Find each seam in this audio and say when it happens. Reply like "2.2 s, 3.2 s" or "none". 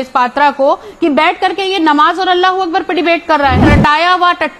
3.6 s

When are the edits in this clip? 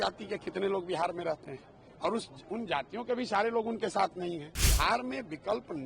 4.6 s

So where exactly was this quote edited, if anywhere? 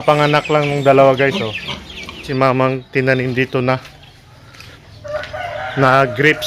2.3 s

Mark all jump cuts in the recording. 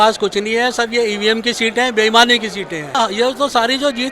2.9 s

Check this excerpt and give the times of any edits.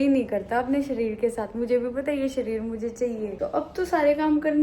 3.3 s

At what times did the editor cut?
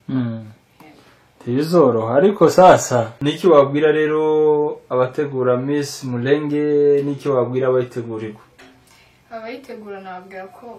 3.2 s

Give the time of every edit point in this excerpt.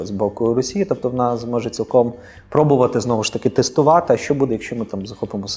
none

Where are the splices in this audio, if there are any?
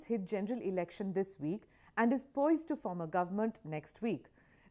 none

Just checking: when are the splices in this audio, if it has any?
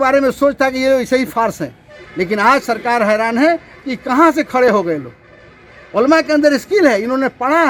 none

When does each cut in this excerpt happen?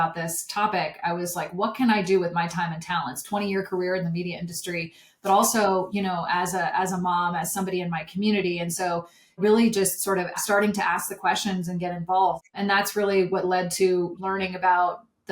3.2 s, 9.4 s, 10.4 s, 12.4 s, 14.1 s

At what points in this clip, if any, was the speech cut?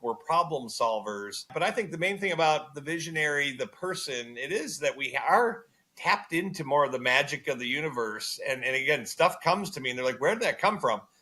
1.5 s

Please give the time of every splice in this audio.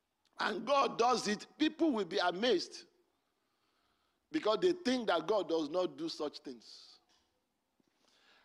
none

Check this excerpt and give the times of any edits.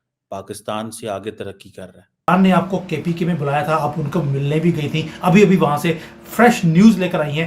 2.3 s

